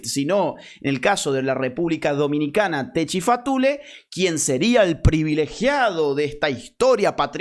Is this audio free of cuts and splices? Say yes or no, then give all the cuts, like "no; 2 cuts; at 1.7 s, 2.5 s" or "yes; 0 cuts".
yes; 0 cuts